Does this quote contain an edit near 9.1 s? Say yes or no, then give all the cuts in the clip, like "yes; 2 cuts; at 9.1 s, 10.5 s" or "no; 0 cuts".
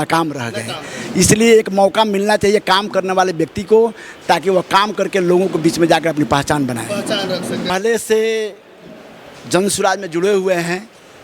no; 1 cut; at 7.7 s